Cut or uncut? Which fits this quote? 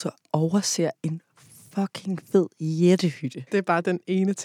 cut